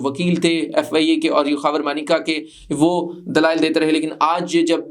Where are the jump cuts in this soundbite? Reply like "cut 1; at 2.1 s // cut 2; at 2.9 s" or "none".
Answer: none